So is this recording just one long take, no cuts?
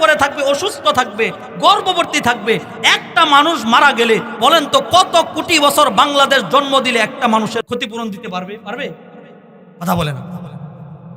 no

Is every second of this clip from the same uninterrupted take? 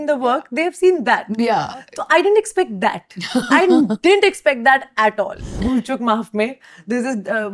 no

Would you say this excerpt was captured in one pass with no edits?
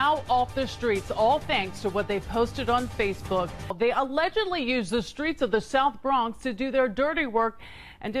no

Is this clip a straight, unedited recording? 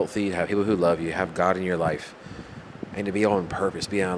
yes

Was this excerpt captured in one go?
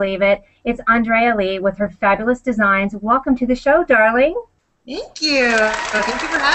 yes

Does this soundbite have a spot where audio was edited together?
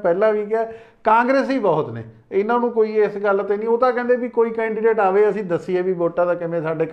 no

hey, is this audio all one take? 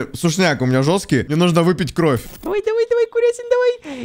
no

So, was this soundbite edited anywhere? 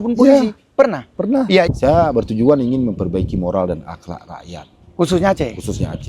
yes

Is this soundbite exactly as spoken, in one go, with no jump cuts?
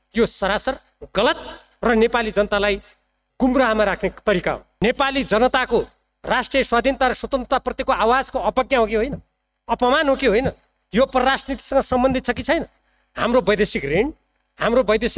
no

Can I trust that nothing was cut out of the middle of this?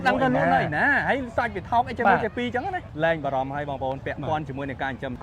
no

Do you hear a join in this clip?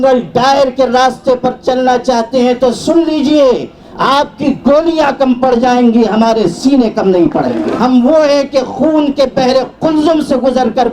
yes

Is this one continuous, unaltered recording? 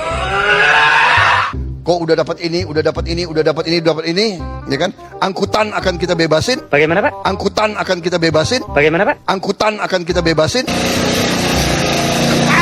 yes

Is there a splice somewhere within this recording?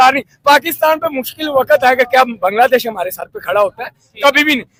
no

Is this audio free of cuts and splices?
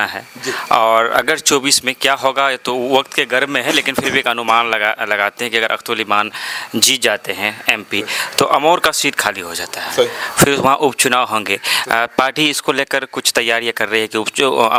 yes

